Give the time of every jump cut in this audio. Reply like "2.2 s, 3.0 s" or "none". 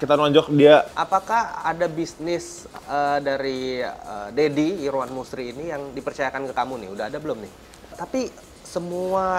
1.0 s, 8.0 s